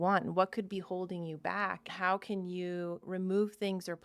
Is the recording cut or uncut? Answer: cut